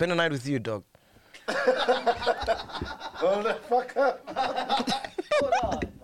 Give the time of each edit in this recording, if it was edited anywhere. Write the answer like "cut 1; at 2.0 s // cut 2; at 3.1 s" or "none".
none

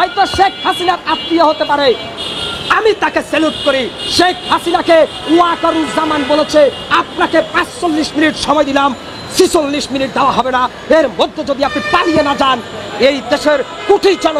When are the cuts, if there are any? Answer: none

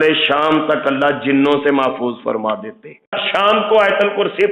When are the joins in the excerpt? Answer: cut 1; at 3.2 s

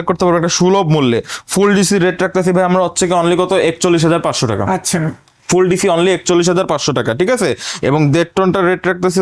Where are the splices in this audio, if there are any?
none

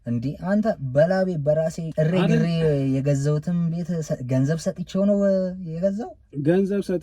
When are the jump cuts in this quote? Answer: cut 1; at 1.8 s

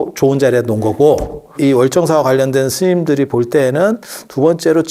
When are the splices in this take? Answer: cut 1; at 1.5 s

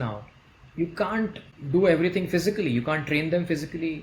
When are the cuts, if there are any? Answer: cut 1; at 1.5 s

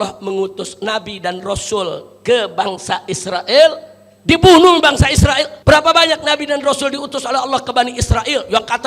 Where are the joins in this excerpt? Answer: cut 1; at 5.5 s

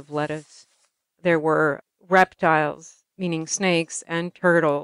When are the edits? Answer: cut 1; at 1.9 s // cut 2; at 3.0 s

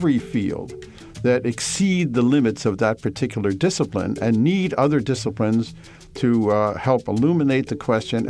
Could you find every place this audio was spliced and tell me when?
none

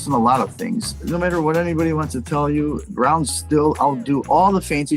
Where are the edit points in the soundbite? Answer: cut 1; at 0.9 s

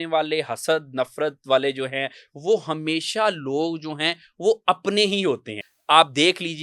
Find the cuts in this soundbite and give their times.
cut 1; at 5.7 s

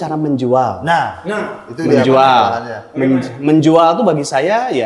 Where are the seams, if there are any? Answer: none

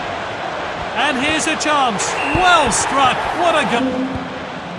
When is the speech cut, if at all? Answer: none

